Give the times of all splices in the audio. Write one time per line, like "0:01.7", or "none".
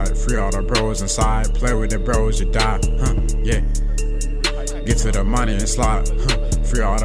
none